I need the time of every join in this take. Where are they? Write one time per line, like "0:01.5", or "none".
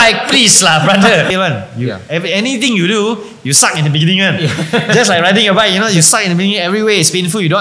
0:01.3